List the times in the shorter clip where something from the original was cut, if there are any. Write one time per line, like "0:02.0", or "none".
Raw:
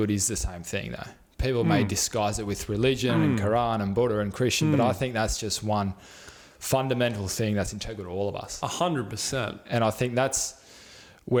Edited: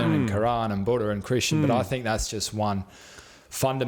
none